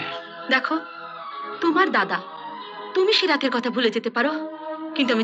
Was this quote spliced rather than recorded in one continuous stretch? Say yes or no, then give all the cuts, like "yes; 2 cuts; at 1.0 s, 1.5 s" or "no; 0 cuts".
no; 0 cuts